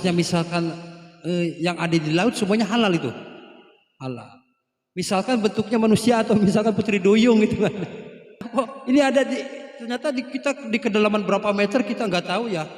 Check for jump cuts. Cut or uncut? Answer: cut